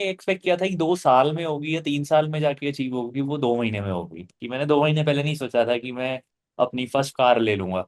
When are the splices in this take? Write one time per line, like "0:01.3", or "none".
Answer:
0:04.3